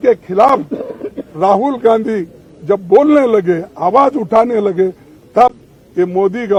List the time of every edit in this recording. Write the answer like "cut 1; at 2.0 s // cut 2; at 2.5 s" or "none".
none